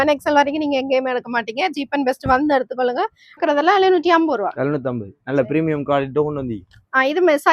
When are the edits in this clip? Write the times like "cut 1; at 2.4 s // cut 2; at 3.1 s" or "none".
cut 1; at 3.4 s